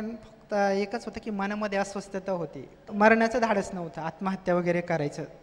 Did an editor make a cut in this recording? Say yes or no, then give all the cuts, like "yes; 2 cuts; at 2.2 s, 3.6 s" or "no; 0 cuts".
yes; 1 cut; at 2.8 s